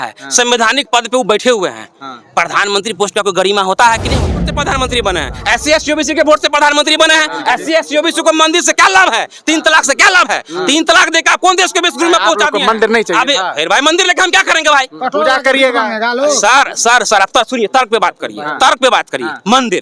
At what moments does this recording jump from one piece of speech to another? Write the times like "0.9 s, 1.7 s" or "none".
4.5 s